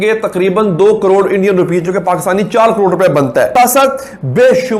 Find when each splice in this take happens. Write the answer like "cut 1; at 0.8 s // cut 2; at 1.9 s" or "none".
cut 1; at 3.5 s